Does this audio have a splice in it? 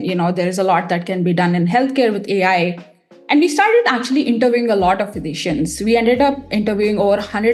no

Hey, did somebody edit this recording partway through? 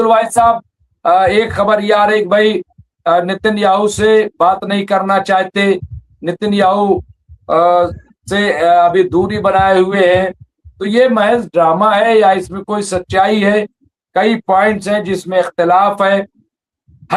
no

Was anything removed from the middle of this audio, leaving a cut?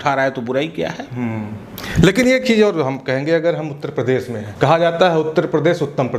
no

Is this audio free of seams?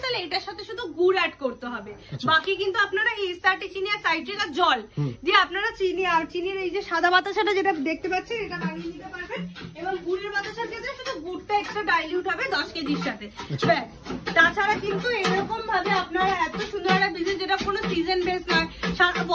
yes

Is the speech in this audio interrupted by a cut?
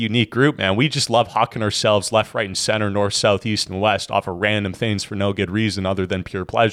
no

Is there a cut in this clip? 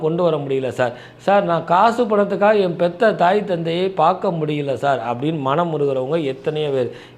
no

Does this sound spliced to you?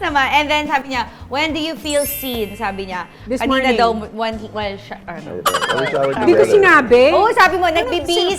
no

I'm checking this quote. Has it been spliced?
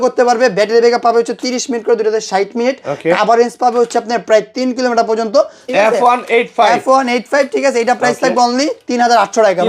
yes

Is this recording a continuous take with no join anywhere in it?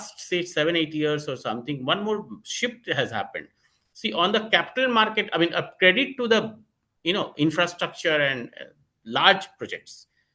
yes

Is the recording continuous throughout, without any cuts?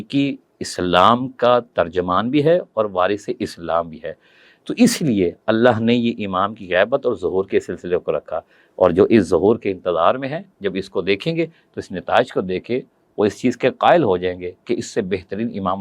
yes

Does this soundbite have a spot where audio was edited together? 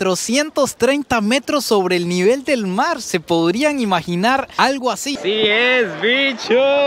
yes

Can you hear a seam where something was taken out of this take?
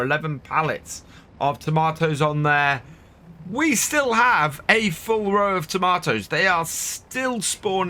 no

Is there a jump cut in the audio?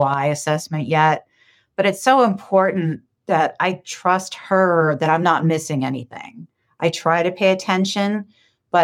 yes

